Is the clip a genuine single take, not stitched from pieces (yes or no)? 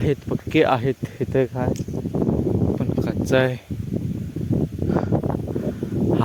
yes